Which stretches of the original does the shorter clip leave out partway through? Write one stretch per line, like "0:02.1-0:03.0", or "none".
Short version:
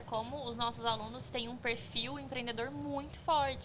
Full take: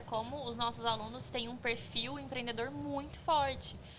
none